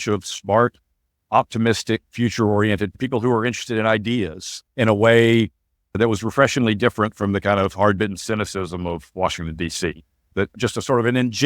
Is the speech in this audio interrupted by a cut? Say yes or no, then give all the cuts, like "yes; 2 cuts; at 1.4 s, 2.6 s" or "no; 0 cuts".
no; 0 cuts